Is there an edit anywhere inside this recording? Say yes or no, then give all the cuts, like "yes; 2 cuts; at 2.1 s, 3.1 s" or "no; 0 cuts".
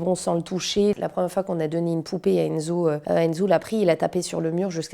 yes; 1 cut; at 0.9 s